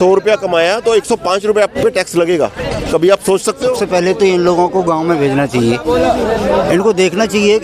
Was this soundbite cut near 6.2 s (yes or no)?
no